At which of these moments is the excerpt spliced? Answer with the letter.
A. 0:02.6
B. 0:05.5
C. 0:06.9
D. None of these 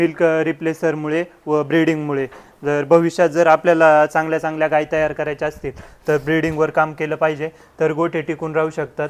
D